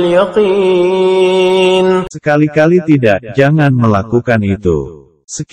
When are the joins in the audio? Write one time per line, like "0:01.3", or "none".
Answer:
0:02.1